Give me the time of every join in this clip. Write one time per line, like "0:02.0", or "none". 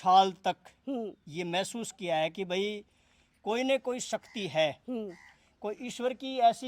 none